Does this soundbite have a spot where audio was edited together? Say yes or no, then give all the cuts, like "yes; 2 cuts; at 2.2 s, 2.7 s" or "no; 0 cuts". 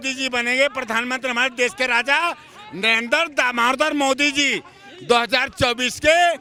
no; 0 cuts